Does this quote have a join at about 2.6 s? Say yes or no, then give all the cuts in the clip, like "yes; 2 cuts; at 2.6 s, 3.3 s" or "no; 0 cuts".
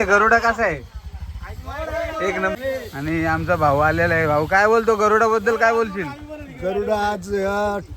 yes; 1 cut; at 2.6 s